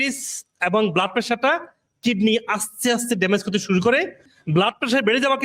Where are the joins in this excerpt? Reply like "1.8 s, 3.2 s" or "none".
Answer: 4.2 s